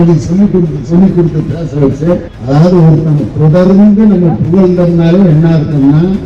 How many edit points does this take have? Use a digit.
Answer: 1